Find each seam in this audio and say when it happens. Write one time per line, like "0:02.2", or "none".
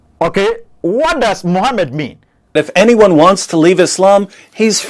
0:02.6